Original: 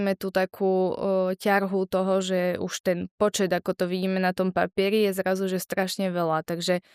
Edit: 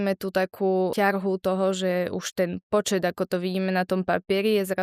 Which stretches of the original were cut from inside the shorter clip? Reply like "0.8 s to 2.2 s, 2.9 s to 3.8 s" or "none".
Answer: 0.9 s to 1.4 s